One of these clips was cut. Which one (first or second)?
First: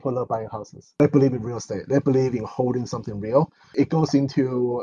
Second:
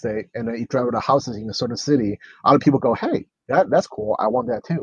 first